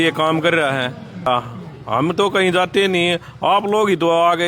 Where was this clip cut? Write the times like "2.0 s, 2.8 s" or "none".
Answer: 1.3 s